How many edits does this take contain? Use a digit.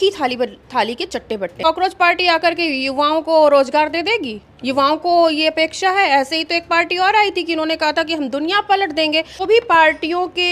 2